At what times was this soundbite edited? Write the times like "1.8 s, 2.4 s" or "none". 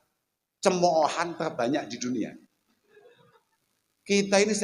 3.4 s